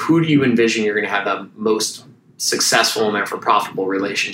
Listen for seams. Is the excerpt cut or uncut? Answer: cut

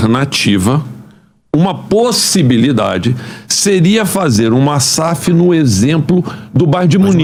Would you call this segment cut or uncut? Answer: uncut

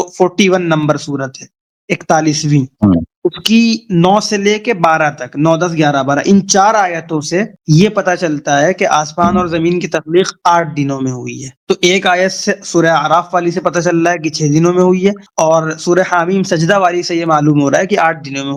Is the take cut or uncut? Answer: uncut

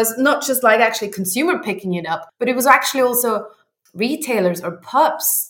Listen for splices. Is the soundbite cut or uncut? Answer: cut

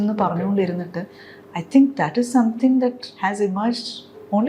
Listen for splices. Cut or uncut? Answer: cut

